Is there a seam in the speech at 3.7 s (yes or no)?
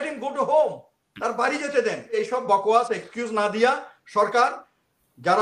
no